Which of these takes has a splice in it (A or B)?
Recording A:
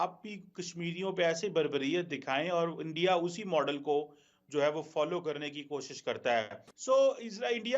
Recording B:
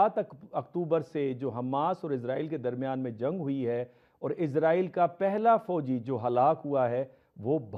A